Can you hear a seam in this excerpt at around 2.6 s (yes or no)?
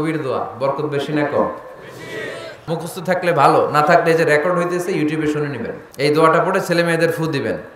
yes